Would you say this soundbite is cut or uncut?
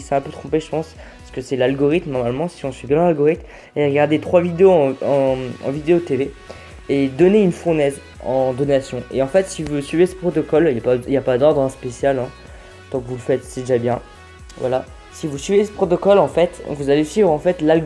cut